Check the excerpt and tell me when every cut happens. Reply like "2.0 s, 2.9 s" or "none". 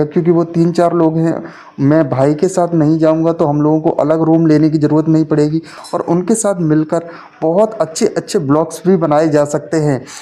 5.8 s